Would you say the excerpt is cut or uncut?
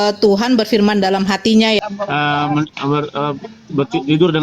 cut